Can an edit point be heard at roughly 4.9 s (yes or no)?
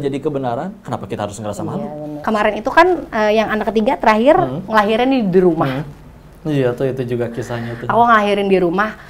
no